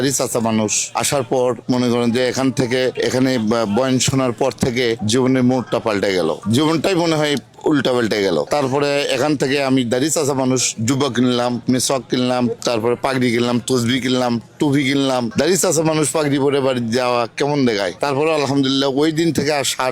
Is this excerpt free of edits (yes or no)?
yes